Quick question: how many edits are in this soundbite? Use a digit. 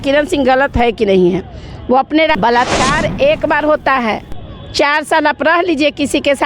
1